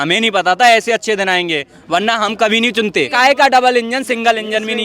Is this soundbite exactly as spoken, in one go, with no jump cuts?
no; 1 cut; at 3.1 s

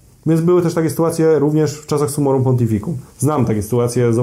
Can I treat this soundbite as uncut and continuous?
yes; 0 cuts

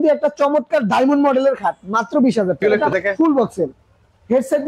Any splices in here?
yes; 1 cut; at 2.6 s

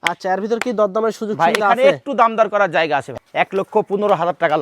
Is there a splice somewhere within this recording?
yes; 1 cut; at 3.1 s

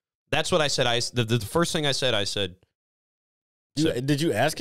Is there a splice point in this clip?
no; 0 cuts

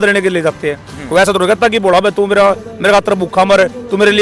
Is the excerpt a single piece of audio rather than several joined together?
yes; 0 cuts

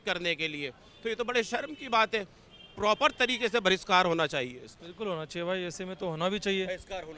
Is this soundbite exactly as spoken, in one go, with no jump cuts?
yes; 0 cuts

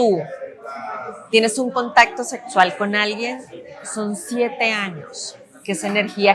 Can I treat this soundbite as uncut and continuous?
yes; 0 cuts

